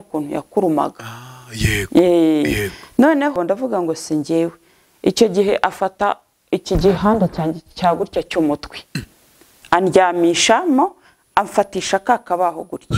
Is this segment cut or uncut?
cut